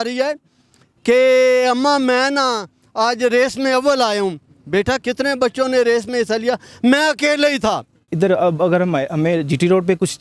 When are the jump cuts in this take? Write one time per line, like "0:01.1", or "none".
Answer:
0:05.0
0:08.0

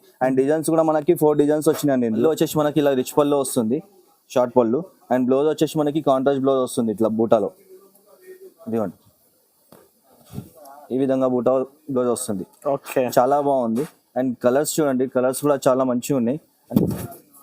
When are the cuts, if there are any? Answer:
0:02.2
0:16.5

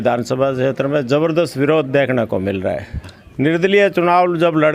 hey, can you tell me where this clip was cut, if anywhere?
0:03.2

